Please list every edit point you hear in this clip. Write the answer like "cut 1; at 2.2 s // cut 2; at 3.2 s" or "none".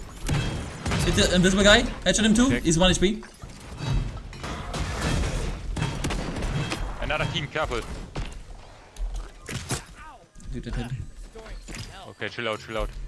cut 1; at 4.4 s // cut 2; at 8.3 s